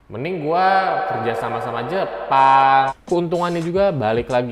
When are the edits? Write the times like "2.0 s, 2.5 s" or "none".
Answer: 2.9 s